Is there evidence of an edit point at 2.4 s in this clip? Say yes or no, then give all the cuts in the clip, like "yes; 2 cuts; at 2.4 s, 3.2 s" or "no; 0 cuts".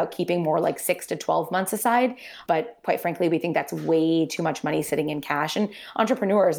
yes; 1 cut; at 2.4 s